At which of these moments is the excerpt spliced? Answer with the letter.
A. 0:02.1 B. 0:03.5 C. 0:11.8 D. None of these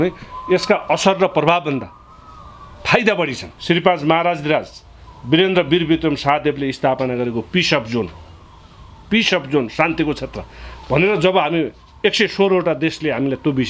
B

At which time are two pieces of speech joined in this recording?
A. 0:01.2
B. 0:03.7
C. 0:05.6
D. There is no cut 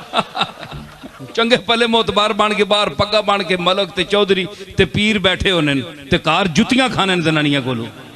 A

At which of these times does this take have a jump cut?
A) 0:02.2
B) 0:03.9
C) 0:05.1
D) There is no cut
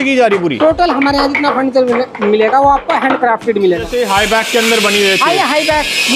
B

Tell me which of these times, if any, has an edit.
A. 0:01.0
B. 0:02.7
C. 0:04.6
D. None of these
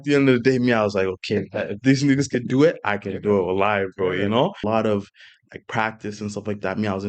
C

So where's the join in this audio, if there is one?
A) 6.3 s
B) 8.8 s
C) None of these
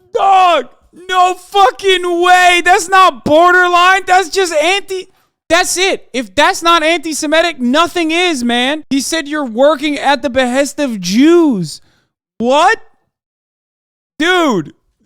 B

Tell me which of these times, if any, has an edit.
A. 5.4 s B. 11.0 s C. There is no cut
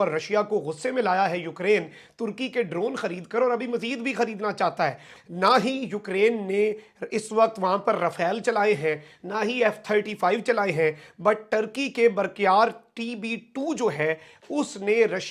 C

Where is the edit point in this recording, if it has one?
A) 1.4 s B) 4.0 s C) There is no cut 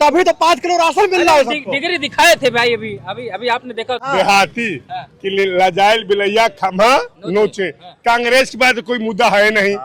B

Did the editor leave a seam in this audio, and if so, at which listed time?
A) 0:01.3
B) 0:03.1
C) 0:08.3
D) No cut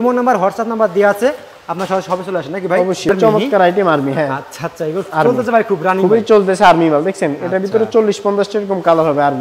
B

